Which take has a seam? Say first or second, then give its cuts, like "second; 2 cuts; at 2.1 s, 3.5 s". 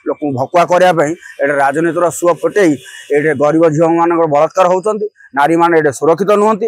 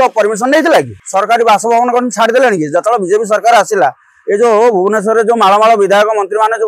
second; 1 cut; at 1.0 s